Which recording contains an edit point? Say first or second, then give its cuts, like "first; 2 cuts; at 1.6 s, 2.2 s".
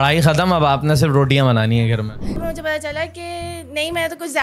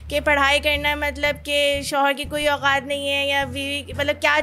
first; 1 cut; at 2.4 s